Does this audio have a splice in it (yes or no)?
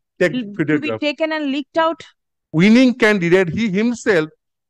yes